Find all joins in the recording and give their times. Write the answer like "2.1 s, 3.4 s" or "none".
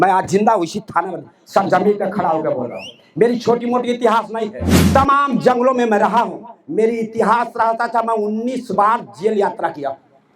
4.7 s

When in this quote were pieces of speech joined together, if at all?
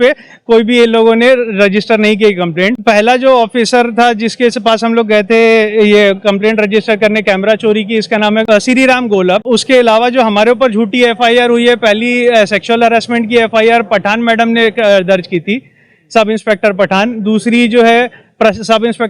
2.8 s, 8.5 s, 9.4 s

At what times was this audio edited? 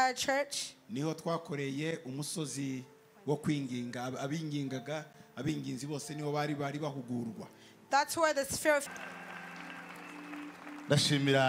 8.8 s

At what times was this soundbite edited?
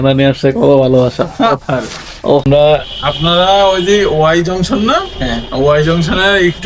2.5 s

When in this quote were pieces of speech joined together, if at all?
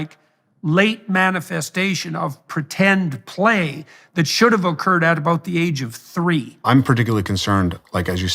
6.5 s

